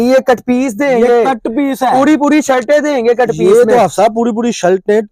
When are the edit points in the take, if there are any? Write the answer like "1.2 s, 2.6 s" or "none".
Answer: none